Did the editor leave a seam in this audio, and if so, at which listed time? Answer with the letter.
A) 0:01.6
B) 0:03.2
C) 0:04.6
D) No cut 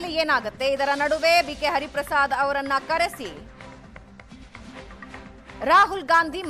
D